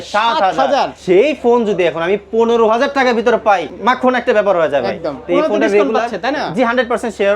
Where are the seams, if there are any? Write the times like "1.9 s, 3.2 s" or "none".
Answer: 0.9 s, 3.7 s